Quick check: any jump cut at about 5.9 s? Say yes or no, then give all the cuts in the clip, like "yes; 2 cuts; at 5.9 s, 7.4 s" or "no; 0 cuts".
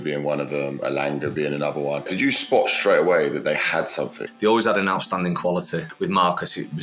yes; 3 cuts; at 2.1 s, 4.2 s, 5.9 s